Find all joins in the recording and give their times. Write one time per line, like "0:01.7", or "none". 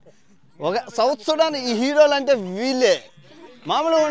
none